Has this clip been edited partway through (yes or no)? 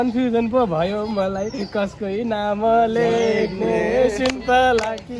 no